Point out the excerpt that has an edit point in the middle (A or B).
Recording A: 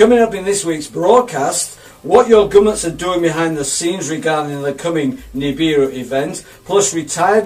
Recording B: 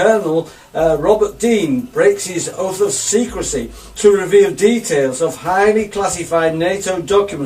A